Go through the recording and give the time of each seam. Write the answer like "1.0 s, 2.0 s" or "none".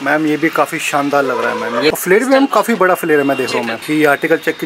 1.9 s, 3.8 s

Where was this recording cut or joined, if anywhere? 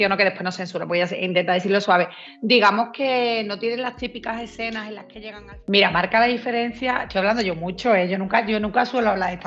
5.2 s

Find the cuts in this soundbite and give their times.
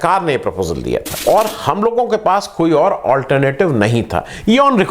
1.1 s

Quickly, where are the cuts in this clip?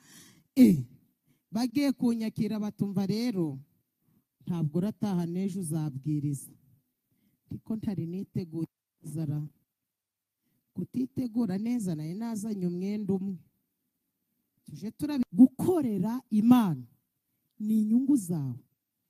15.2 s

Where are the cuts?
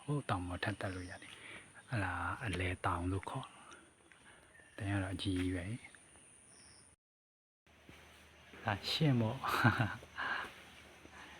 7.0 s

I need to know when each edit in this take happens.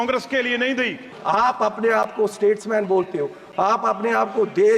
1.1 s

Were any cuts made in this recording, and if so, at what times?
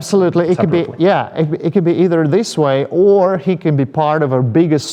none

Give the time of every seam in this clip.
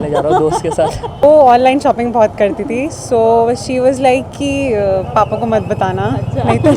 1.2 s

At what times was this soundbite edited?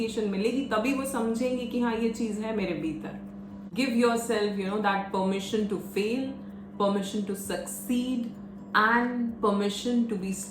3.7 s

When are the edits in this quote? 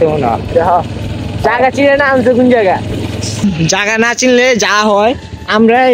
3.4 s

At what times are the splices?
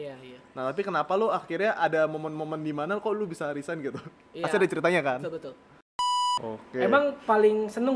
6.0 s

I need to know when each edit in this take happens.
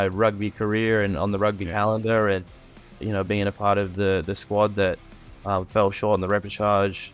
none

